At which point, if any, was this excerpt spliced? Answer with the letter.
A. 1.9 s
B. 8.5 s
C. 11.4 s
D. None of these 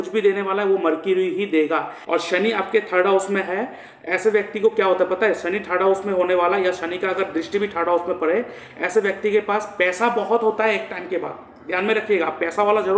A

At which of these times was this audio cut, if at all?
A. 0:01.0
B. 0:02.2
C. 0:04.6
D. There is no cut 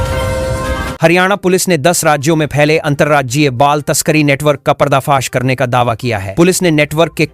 A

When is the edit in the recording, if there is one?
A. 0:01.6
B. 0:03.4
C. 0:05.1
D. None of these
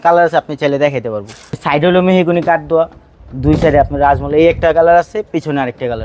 A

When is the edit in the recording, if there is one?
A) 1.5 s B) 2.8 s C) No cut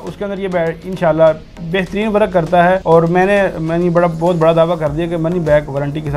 B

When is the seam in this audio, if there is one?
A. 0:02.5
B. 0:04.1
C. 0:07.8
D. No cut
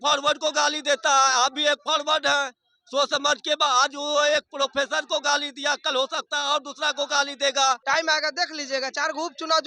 C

